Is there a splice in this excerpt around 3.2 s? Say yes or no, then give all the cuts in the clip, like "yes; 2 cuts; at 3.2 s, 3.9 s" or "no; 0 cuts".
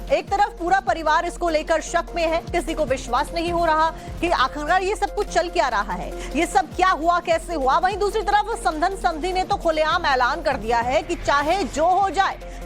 no; 1 cut; at 1.6 s